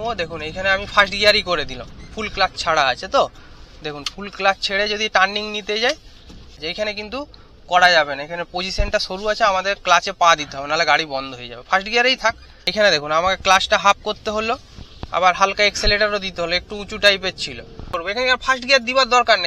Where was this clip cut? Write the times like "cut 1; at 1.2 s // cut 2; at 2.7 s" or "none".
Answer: cut 1; at 6.6 s // cut 2; at 12.7 s // cut 3; at 17.9 s